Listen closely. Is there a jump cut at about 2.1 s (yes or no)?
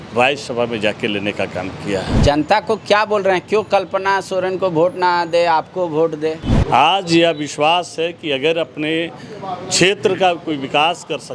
yes